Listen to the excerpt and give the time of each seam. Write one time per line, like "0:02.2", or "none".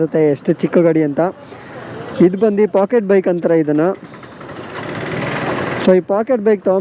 none